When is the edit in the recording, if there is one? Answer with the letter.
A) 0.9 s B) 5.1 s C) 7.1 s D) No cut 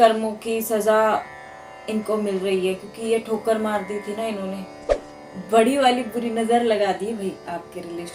B